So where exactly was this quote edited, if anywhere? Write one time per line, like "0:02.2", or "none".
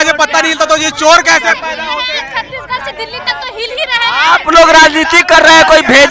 none